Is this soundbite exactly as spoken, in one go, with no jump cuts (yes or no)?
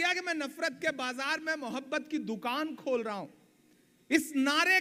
yes